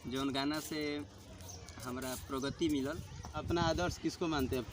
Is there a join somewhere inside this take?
yes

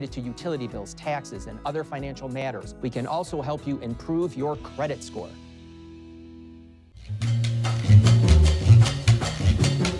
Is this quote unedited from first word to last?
no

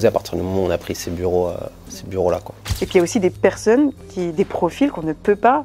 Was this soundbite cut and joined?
yes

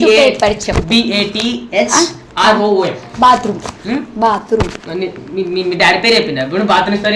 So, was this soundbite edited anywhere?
no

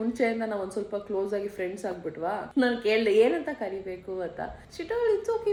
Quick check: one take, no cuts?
yes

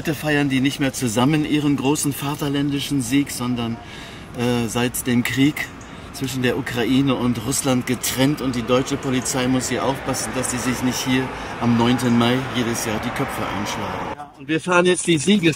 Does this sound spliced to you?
no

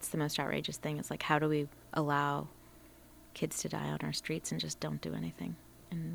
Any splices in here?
no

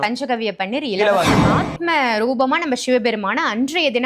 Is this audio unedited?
no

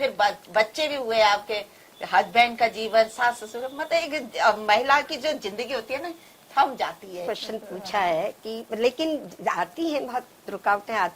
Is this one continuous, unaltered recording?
no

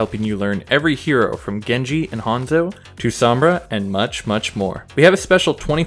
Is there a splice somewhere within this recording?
yes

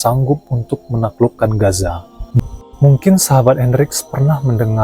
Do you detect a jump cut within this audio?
yes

